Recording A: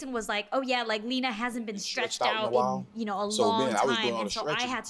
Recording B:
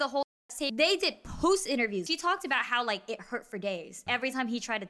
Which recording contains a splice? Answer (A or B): B